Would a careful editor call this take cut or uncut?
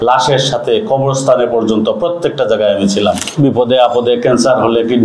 cut